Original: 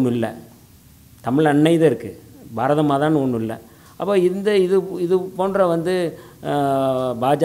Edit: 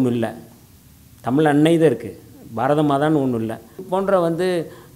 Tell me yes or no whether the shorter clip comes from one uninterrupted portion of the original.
no